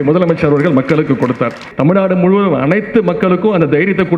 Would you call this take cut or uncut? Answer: cut